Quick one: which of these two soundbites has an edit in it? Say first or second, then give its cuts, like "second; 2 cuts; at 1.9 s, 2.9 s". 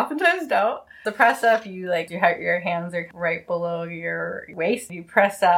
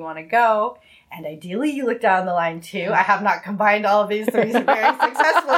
first; 4 cuts; at 1.0 s, 2.1 s, 3.1 s, 4.9 s